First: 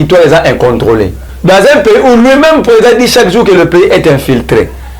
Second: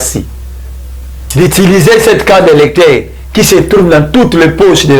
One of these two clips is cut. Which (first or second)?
first